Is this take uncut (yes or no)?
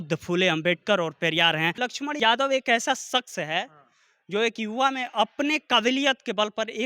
no